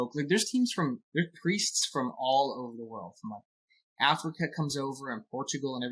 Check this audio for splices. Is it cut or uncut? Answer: uncut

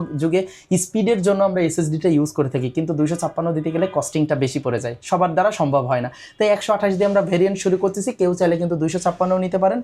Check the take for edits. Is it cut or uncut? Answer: uncut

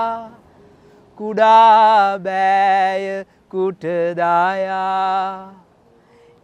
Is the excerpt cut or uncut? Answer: uncut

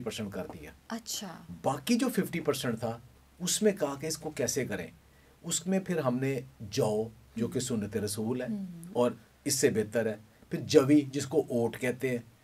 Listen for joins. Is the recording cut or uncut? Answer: uncut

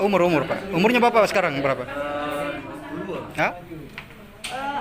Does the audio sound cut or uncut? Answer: cut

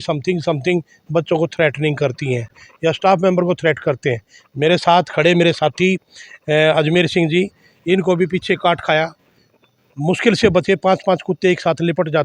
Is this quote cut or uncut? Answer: uncut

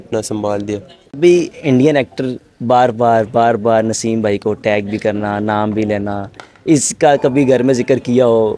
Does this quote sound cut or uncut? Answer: cut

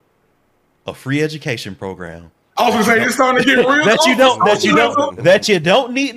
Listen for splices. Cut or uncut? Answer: uncut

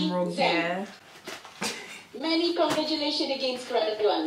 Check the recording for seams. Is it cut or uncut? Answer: uncut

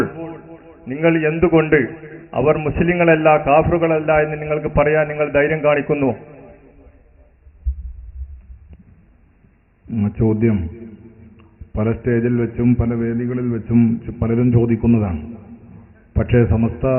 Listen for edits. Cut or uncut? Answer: uncut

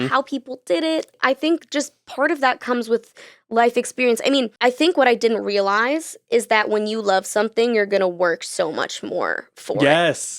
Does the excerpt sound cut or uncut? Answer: cut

